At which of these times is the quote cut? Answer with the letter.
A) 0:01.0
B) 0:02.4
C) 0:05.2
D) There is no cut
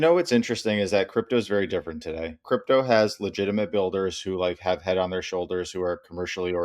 B